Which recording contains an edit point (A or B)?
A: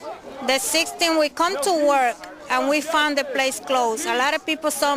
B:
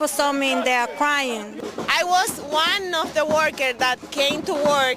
B